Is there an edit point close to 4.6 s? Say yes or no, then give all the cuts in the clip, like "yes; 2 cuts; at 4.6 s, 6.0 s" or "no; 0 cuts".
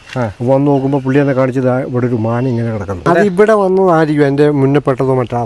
no; 1 cut; at 3.0 s